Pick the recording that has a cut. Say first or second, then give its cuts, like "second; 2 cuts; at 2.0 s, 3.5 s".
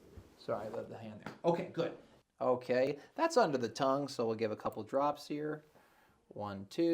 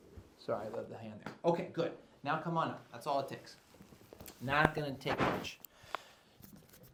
first; 1 cut; at 2.1 s